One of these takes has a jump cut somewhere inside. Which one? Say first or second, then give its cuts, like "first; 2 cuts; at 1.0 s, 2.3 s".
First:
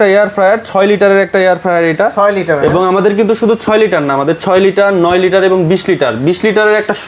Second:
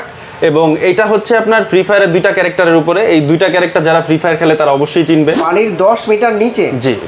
second; 1 cut; at 5.4 s